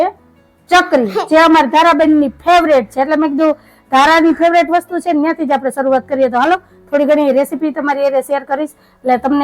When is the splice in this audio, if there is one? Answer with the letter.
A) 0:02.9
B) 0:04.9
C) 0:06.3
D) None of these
D